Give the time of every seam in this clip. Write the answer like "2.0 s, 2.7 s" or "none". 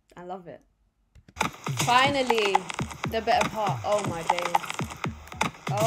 1.2 s

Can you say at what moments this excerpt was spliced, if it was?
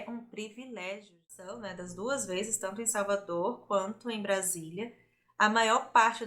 1.6 s

